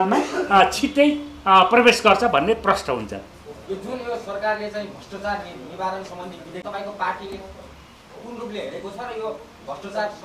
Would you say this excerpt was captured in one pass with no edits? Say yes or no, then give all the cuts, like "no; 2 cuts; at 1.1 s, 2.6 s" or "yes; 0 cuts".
yes; 0 cuts